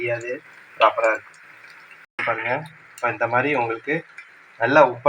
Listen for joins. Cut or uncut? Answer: cut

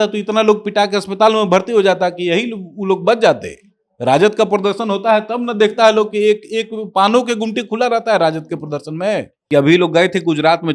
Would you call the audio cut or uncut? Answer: cut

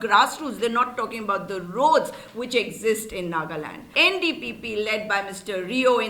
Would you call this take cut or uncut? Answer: cut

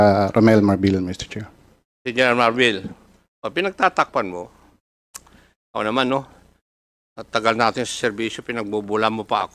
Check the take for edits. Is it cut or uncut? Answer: uncut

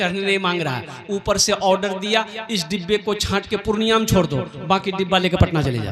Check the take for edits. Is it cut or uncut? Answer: uncut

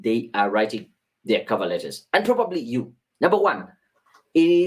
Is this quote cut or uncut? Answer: cut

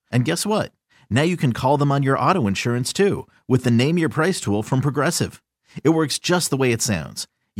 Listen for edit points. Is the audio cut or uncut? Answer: uncut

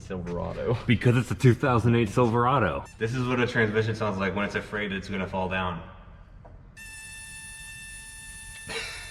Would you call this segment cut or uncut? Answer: cut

